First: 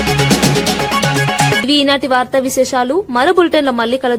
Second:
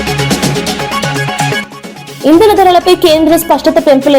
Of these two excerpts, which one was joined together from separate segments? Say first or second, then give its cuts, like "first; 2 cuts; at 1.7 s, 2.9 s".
second; 1 cut; at 1.6 s